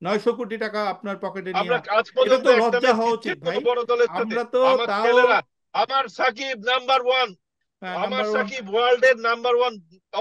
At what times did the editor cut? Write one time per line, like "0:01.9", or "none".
none